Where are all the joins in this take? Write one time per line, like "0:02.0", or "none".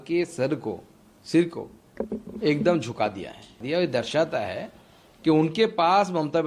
0:03.6

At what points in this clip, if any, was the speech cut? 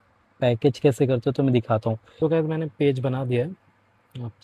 0:02.0

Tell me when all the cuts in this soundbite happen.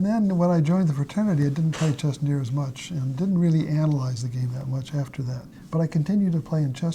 none

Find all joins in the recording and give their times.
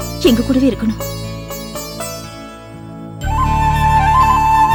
none

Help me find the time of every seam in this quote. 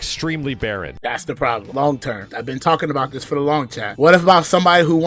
0:01.2
0:02.3
0:03.9

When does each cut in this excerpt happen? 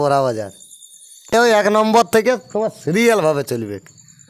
0:01.3

